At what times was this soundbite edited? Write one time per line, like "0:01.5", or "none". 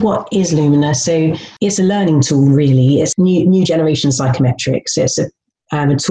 0:01.5
0:03.1